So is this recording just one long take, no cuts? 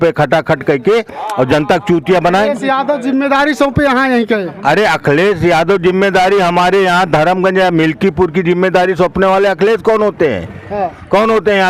yes; 0 cuts

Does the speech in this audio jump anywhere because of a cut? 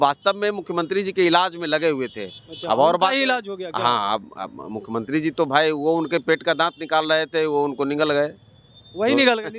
no; 0 cuts

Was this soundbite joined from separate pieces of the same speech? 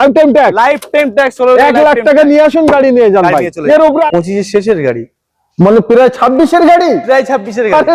yes; 1 cut; at 4.1 s

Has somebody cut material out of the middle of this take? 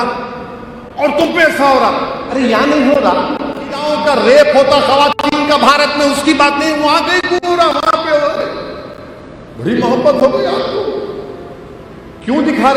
yes; 1 cut; at 3.9 s

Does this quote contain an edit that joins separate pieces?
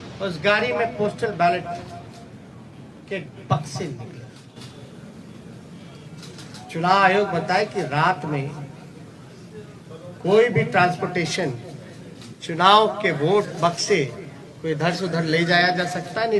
no; 0 cuts

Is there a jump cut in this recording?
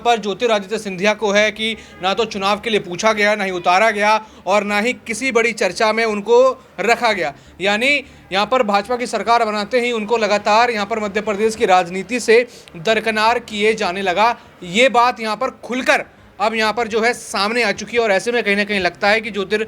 no; 0 cuts

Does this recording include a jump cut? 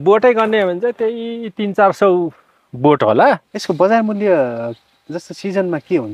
yes; 1 cut; at 3.5 s

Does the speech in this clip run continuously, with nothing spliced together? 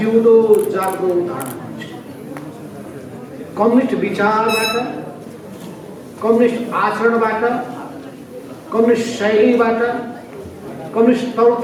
yes; 0 cuts

